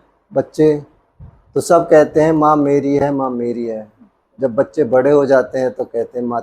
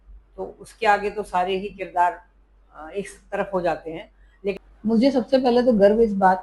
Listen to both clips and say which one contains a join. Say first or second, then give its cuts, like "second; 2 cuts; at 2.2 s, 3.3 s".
second; 1 cut; at 4.6 s